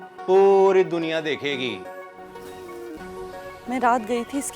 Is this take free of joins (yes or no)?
no